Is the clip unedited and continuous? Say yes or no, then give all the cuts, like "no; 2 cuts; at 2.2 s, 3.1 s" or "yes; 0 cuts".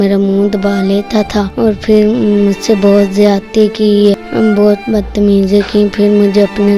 no; 2 cuts; at 1.5 s, 4.3 s